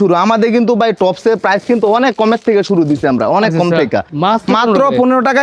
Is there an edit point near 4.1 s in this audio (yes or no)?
yes